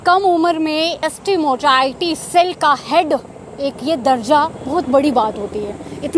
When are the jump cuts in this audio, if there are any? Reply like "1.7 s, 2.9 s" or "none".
1.0 s